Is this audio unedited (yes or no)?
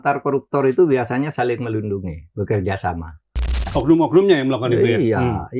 no